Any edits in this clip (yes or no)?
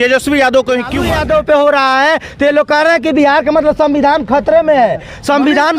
yes